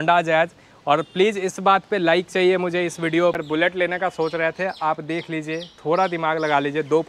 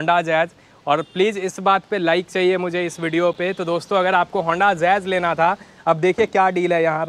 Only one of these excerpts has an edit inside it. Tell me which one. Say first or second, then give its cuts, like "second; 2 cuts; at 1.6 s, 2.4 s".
first; 1 cut; at 3.4 s